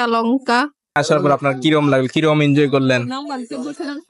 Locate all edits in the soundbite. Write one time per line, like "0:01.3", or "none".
0:00.9